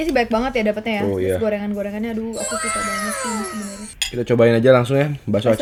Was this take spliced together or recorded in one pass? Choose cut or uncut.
uncut